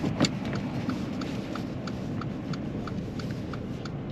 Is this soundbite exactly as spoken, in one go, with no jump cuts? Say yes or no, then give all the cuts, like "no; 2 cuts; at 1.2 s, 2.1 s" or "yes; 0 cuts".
yes; 0 cuts